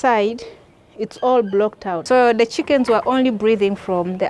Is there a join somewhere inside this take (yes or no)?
yes